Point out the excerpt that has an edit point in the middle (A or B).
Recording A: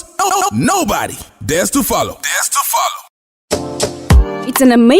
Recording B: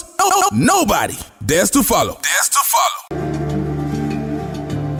A